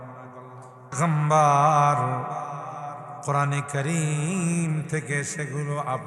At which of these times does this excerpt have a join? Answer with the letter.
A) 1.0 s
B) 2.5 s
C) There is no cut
A